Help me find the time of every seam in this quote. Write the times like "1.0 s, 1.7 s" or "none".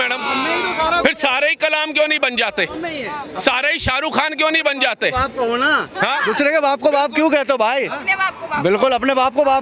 none